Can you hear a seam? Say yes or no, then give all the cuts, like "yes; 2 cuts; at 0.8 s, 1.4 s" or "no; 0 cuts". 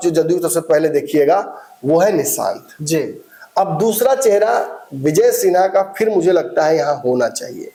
no; 0 cuts